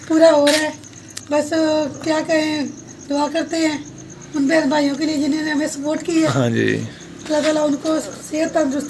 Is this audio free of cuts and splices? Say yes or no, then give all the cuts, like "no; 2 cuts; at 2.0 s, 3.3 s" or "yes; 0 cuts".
yes; 0 cuts